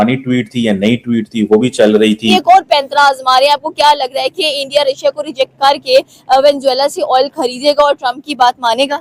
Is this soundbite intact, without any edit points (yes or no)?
no